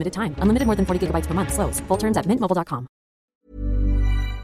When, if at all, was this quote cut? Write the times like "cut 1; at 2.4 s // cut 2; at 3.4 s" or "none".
cut 1; at 3.4 s